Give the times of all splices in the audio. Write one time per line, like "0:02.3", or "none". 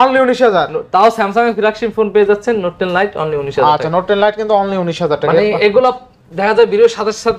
none